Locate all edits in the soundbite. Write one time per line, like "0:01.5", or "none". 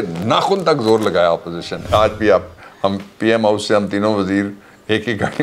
0:01.9